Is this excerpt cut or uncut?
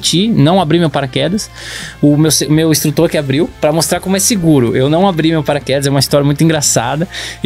cut